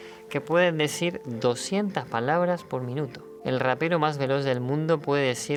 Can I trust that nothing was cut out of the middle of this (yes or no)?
yes